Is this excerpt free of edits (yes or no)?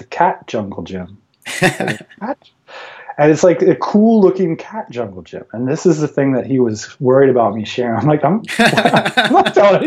yes